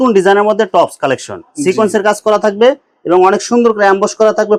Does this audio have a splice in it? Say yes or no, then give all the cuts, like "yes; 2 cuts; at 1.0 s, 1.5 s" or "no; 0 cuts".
no; 0 cuts